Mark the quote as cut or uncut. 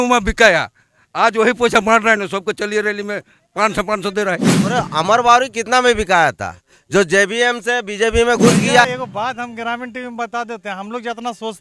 cut